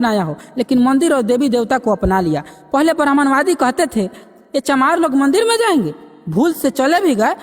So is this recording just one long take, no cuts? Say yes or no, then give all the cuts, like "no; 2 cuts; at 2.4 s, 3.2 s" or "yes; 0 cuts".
yes; 0 cuts